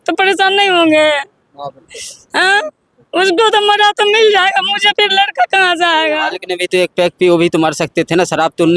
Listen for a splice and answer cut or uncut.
cut